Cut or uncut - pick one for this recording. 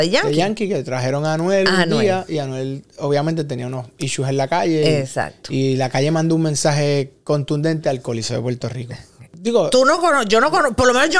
cut